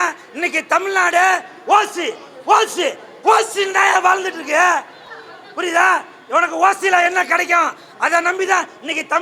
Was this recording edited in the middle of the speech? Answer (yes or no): no